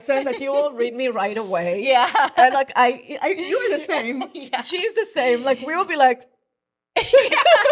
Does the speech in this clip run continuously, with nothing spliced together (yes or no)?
yes